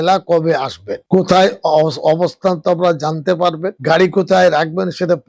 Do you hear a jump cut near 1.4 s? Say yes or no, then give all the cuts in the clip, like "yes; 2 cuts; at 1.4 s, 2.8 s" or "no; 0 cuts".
no; 0 cuts